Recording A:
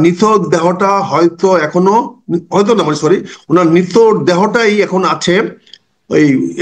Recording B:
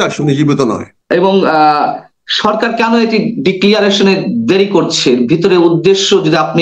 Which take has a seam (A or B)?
B